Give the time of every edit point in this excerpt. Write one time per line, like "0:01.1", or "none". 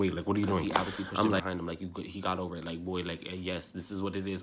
0:01.4